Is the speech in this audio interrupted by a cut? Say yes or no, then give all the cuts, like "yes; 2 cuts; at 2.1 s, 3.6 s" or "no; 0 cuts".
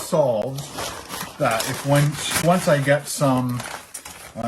no; 0 cuts